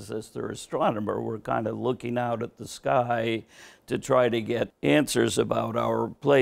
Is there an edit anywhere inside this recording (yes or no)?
yes